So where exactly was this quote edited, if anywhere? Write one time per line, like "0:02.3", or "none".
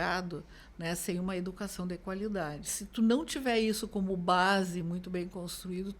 0:02.8